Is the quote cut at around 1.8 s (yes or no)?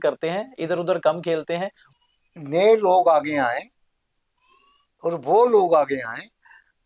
yes